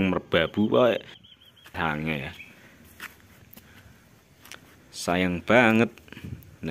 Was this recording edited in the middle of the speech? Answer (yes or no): yes